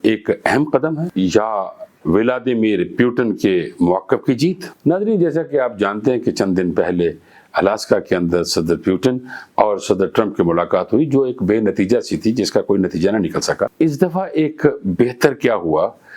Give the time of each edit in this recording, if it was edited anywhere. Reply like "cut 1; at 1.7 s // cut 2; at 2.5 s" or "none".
none